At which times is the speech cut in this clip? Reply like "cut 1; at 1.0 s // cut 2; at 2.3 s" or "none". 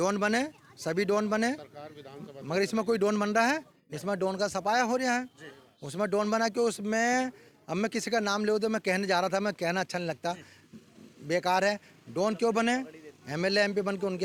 none